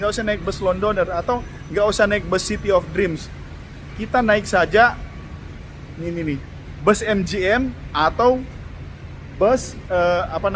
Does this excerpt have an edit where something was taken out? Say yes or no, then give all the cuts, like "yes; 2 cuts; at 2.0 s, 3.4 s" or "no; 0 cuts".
no; 0 cuts